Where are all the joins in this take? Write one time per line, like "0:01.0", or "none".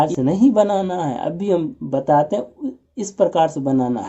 none